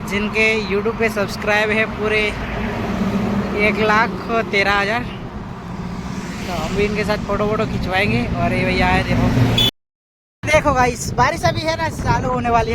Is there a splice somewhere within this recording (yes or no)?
yes